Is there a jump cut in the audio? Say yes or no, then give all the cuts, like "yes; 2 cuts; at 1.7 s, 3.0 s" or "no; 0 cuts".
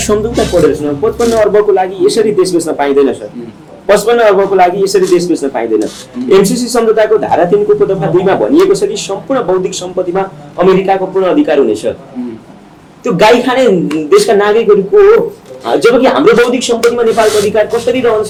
no; 0 cuts